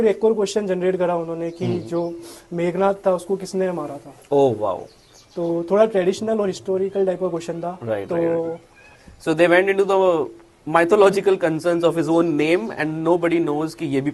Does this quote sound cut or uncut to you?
uncut